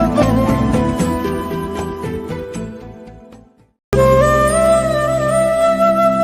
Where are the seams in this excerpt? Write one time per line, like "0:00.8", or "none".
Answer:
none